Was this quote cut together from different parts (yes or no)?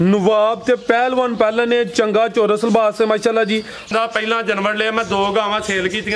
yes